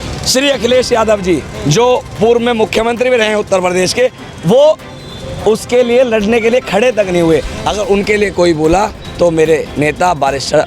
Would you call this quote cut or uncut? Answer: uncut